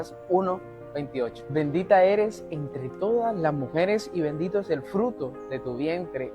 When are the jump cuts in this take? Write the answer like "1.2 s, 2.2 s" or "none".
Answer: 1.4 s